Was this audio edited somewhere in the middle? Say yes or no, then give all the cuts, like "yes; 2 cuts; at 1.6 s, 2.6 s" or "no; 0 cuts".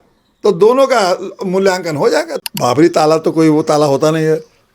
yes; 1 cut; at 2.3 s